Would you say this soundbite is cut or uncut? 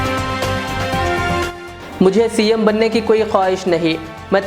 uncut